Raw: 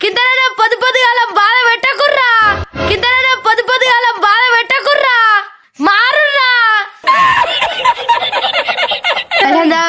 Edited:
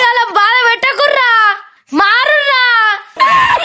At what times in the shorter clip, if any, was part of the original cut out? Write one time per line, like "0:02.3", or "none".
0:01.5